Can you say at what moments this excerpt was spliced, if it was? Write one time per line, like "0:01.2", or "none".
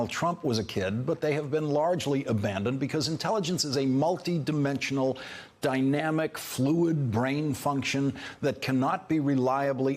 0:04.6